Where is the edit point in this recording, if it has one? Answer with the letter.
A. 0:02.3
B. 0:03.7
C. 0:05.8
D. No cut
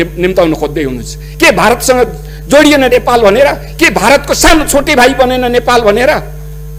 D